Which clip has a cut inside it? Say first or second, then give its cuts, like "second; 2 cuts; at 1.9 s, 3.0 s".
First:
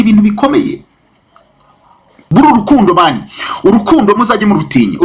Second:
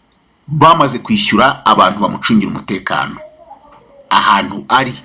first; 1 cut; at 2.2 s